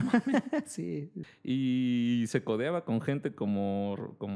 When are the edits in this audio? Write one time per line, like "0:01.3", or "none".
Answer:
0:01.1

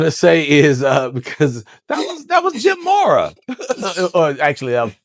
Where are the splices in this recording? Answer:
none

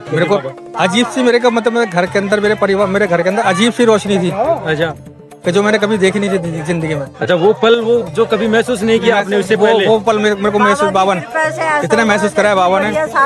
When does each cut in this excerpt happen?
none

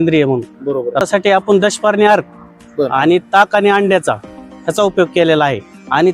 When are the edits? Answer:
0:01.0

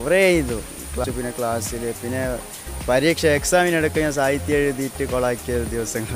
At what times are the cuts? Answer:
0:01.0

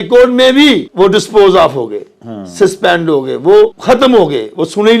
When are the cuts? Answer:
0:00.9
0:03.8

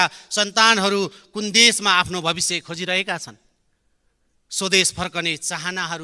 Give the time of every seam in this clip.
none

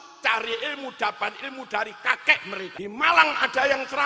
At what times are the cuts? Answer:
0:02.7

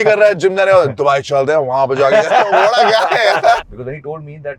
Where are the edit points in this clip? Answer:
0:03.6

